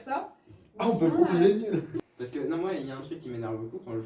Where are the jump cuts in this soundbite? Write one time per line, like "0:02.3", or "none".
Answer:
0:01.9